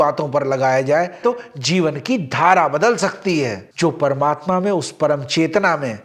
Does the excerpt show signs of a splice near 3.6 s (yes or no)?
yes